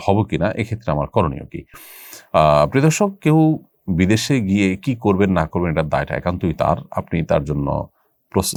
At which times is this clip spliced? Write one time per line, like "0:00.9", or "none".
none